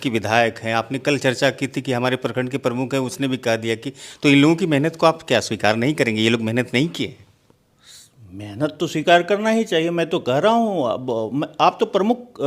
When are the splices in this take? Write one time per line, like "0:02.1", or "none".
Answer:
none